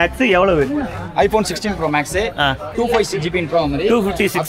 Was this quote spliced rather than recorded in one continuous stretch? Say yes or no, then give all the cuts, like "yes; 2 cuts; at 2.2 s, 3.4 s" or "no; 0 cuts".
yes; 1 cut; at 2.7 s